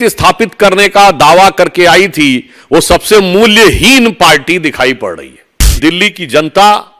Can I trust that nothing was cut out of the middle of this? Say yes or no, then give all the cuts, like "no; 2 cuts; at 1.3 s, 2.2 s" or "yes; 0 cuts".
no; 1 cut; at 5.8 s